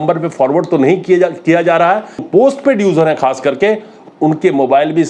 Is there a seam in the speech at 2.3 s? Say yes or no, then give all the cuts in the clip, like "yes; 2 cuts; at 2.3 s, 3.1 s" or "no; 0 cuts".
yes; 1 cut; at 2.3 s